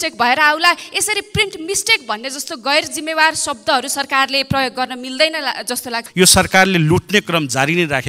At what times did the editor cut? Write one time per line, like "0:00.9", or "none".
0:06.0